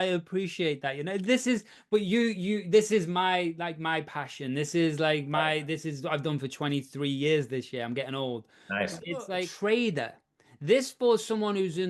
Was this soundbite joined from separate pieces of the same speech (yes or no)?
yes